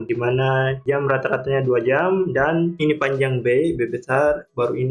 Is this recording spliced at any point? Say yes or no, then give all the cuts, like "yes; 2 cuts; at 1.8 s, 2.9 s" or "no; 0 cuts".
yes; 1 cut; at 2.7 s